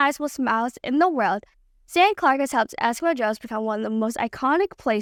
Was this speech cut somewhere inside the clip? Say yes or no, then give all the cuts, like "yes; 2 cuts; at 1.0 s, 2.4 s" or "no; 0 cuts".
no; 0 cuts